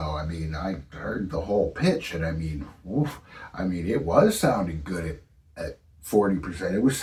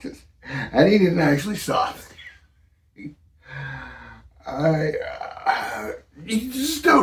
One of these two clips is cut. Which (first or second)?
second